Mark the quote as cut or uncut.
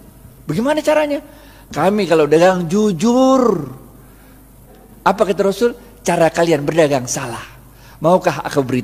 cut